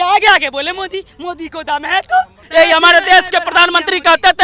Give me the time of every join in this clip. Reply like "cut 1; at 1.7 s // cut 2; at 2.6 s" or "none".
cut 1; at 2.4 s